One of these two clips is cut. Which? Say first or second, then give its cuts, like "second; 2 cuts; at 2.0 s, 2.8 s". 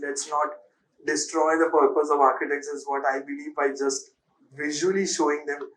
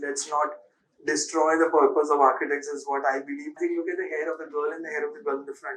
second; 1 cut; at 3.6 s